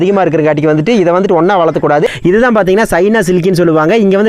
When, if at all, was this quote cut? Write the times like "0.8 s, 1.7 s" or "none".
2.1 s

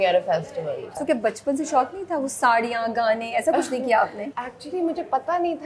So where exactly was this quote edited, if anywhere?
0.9 s, 4.3 s

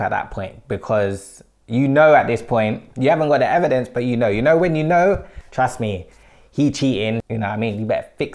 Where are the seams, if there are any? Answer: 5.4 s

